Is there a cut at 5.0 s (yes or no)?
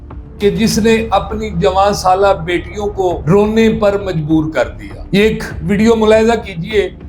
no